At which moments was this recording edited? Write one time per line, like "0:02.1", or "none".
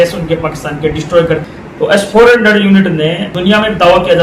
0:01.4
0:03.3